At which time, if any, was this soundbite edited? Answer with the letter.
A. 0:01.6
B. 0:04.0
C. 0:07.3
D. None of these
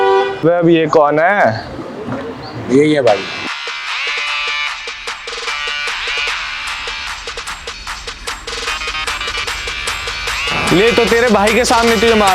D